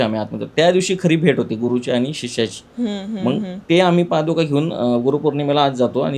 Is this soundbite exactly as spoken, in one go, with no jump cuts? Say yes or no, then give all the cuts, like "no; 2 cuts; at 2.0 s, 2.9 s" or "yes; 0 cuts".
yes; 0 cuts